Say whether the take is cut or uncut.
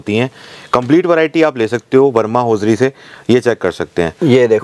uncut